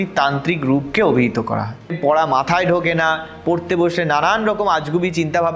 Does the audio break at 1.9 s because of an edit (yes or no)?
yes